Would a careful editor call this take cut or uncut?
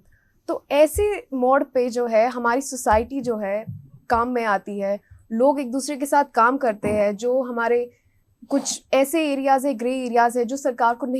uncut